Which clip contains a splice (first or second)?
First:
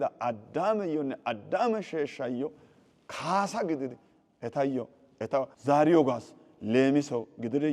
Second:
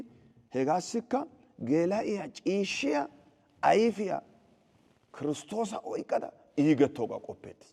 first